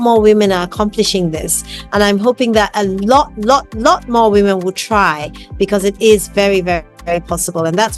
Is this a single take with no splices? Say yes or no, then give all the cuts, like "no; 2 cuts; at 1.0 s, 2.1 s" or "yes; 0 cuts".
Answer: yes; 0 cuts